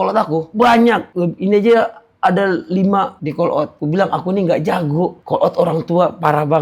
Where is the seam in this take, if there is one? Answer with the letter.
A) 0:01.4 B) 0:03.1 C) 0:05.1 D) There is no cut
B